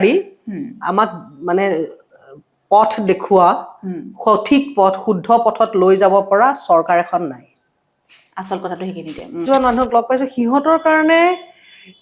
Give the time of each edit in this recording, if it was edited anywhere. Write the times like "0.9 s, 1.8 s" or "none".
9.3 s